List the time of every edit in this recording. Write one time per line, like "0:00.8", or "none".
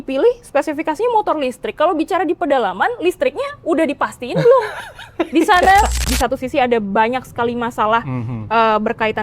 0:06.1